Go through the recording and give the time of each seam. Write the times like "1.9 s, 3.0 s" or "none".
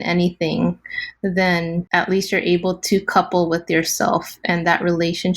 1.9 s